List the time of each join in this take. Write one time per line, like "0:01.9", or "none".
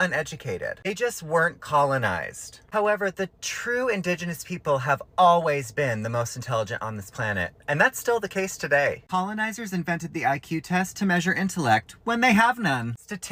none